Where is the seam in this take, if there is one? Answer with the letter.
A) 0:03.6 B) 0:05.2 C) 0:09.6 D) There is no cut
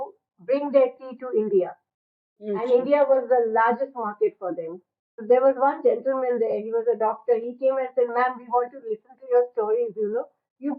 B